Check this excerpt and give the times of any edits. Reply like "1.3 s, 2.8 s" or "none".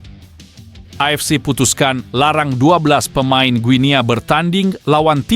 1.0 s